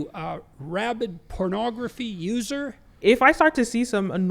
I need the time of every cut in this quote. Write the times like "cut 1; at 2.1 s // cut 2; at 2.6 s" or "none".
cut 1; at 3.0 s